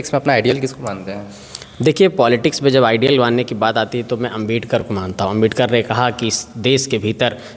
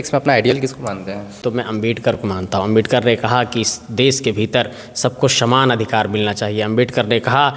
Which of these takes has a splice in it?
second; 1 cut; at 1.8 s

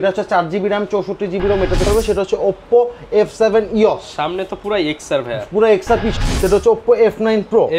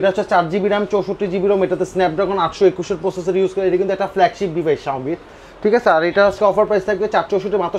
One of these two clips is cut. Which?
first; 2 cuts; at 1.9 s, 6.1 s

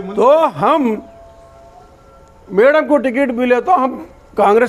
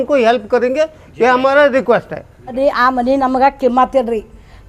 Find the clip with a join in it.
second; 1 cut; at 2.4 s

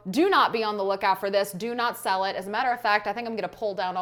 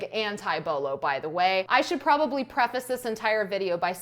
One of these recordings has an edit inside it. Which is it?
second; 1 cut; at 1.7 s

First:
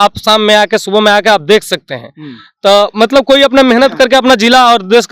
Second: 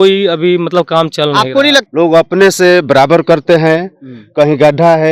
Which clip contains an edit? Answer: second; 1 cut; at 1.9 s

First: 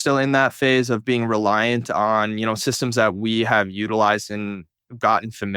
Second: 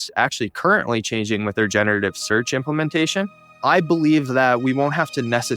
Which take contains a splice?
second; 1 cut; at 3.5 s

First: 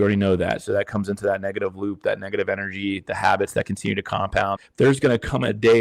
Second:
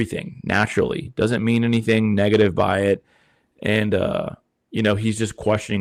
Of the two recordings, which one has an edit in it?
first; 1 cut; at 4.5 s

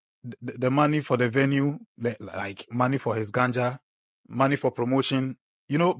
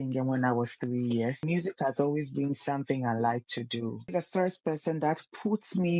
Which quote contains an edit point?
second; 2 cuts; at 1.4 s, 4.1 s

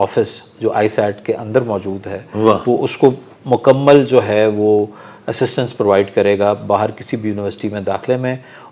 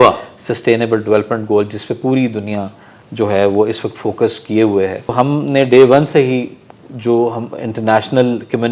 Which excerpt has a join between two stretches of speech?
second; 1 cut; at 5.1 s

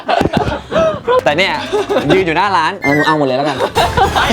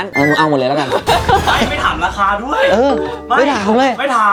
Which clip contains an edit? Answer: first; 1 cut; at 1.2 s

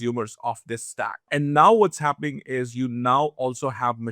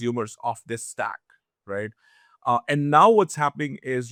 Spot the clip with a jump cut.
first; 1 cut; at 1.3 s

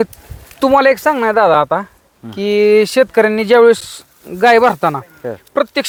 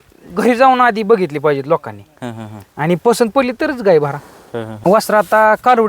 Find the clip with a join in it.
second; 1 cut; at 4.9 s

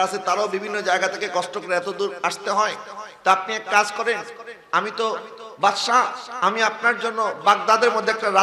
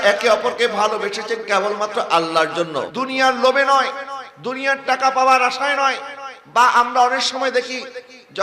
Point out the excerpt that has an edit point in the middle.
second; 1 cut; at 2.9 s

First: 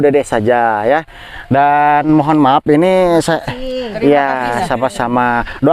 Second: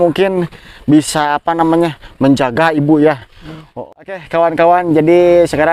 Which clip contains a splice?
second; 1 cut; at 3.6 s

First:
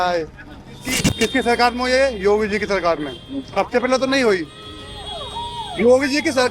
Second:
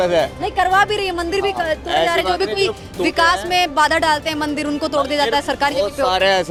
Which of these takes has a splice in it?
first; 1 cut; at 1.0 s

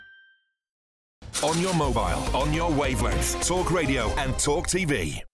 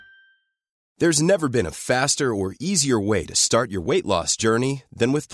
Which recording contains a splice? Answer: first; 1 cut; at 0.9 s

